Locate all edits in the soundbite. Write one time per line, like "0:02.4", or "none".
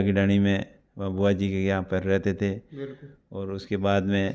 none